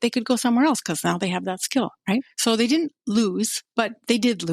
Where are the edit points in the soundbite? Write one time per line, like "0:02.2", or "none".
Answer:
0:02.3
0:03.6

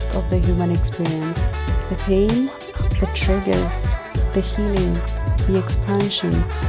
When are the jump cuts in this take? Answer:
none

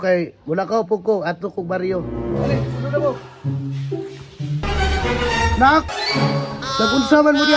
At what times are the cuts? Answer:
0:04.7

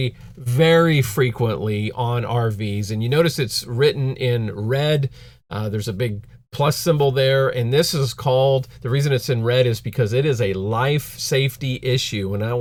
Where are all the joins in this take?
none

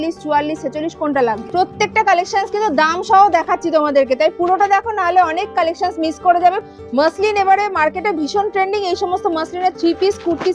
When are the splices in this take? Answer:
0:01.4
0:06.6

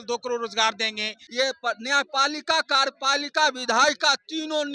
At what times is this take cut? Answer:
0:01.2

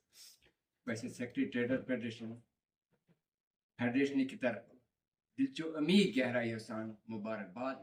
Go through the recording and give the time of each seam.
none

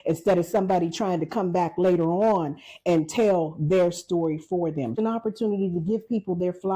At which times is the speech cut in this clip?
0:05.0

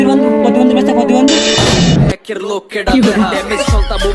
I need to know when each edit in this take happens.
0:01.6

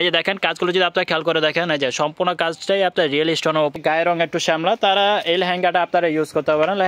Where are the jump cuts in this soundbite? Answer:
0:03.7

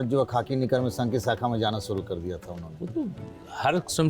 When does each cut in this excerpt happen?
none

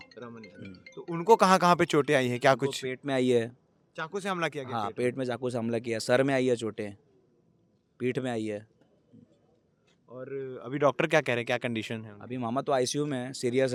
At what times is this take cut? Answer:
none

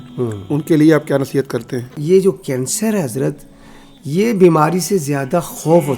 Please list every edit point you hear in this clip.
0:02.0

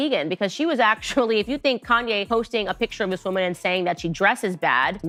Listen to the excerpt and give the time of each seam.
none

